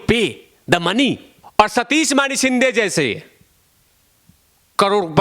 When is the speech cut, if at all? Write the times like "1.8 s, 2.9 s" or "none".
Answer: 1.3 s